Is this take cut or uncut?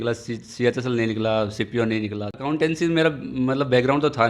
cut